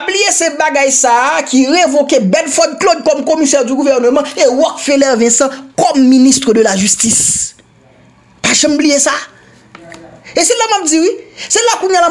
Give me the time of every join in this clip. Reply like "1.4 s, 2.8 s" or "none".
none